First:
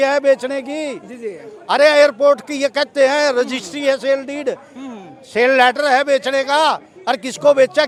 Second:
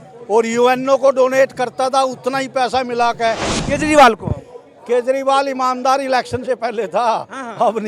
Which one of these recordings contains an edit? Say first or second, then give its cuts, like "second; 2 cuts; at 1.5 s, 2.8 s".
second; 1 cut; at 3.5 s